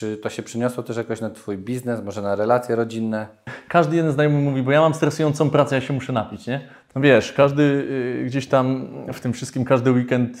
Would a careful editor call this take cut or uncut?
cut